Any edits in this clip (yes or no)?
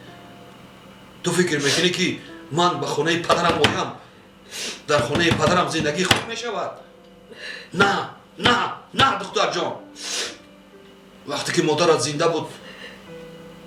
no